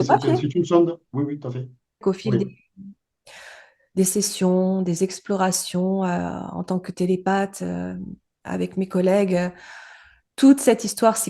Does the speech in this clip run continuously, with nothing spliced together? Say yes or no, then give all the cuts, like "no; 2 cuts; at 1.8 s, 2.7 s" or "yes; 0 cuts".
no; 1 cut; at 2.0 s